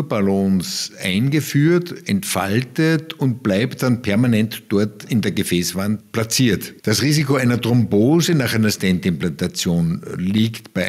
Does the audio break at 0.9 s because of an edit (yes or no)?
no